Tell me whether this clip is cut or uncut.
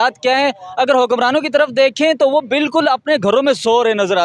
uncut